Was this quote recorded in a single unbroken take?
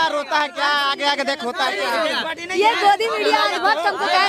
yes; 0 cuts

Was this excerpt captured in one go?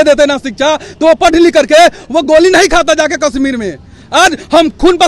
yes; 0 cuts

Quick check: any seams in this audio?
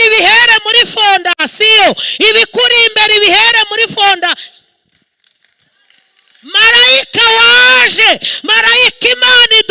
no; 0 cuts

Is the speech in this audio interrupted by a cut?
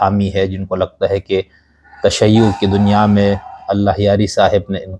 no; 0 cuts

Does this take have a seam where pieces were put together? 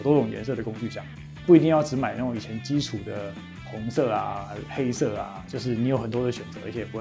no; 0 cuts

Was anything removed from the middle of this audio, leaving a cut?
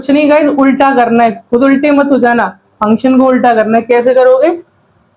no; 0 cuts

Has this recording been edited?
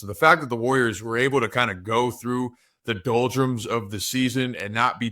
no; 0 cuts

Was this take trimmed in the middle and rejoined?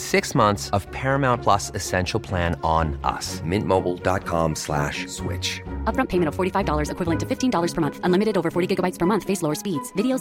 no; 0 cuts

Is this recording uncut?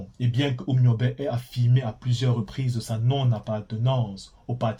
yes; 0 cuts

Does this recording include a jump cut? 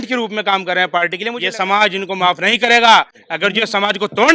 yes; 1 cut; at 1.3 s

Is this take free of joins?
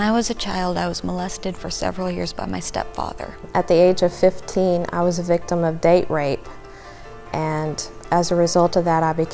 no; 1 cut; at 3.4 s

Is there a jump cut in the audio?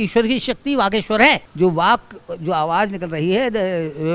yes; 1 cut; at 1.5 s

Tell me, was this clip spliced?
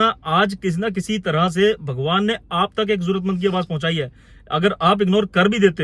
no; 0 cuts

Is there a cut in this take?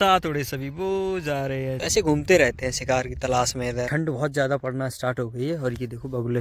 yes; 2 cuts; at 1.7 s, 3.9 s

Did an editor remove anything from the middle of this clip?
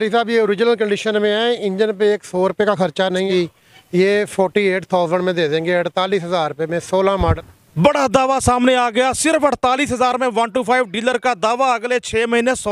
yes; 2 cuts; at 3.3 s, 7.4 s

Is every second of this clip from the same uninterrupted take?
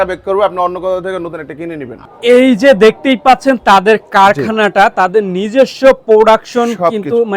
no; 1 cut; at 1.9 s

